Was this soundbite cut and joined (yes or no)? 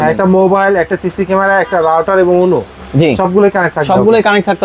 no